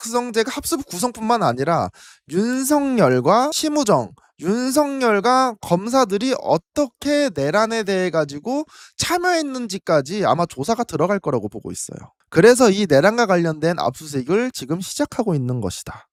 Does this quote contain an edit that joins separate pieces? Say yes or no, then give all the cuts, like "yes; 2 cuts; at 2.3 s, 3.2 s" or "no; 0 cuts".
no; 0 cuts